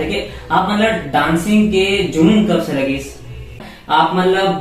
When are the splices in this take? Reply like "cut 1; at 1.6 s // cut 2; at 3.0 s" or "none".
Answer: cut 1; at 3.7 s

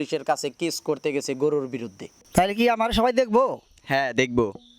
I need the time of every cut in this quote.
cut 1; at 2.2 s

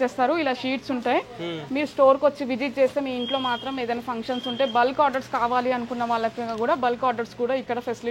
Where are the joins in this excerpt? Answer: none

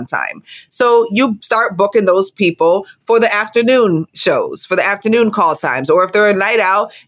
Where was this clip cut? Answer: cut 1; at 2.3 s // cut 2; at 4.1 s

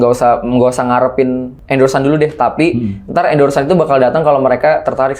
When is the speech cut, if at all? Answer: cut 1; at 1.5 s

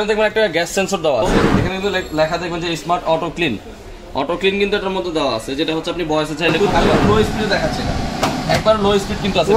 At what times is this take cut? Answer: cut 1; at 1.2 s // cut 2; at 6.6 s

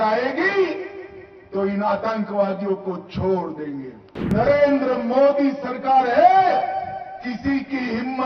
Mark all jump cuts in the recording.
cut 1; at 4.3 s

